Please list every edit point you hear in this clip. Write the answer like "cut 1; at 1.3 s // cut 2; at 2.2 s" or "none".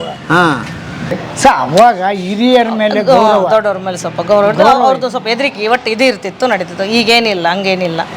cut 1; at 1.2 s